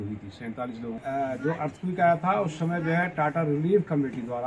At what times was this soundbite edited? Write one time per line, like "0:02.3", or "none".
0:01.0

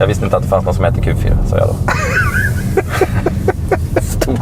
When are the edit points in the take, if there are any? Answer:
none

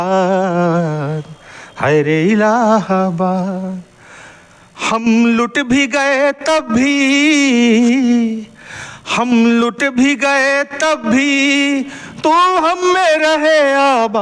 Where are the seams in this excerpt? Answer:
none

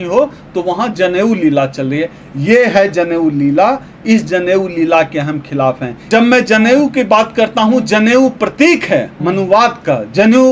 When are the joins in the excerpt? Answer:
0:06.1

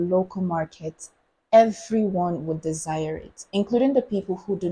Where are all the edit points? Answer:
none

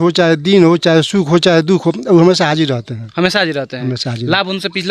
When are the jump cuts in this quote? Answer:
none

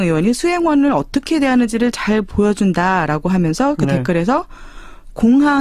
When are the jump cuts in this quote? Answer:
none

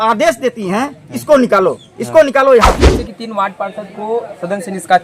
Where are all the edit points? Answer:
0:02.8

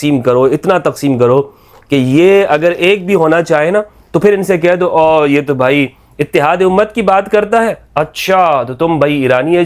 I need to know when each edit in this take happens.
none

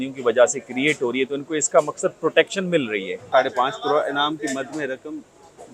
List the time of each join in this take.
0:03.3

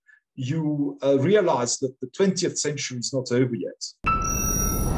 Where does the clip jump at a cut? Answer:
0:03.9

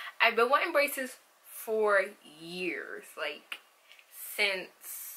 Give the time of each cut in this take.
0:03.4

